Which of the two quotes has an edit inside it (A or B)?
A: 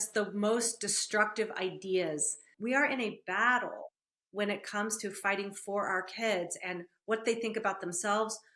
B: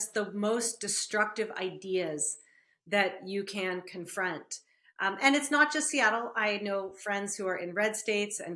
A